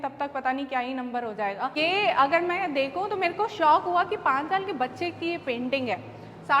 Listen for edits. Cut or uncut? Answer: cut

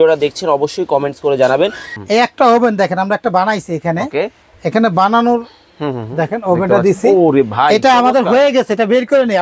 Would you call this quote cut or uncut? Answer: cut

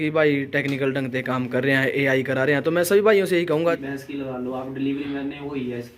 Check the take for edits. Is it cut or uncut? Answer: cut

